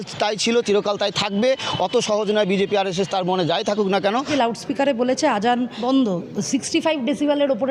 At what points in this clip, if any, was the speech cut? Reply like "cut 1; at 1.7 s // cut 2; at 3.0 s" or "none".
cut 1; at 4.3 s // cut 2; at 5.7 s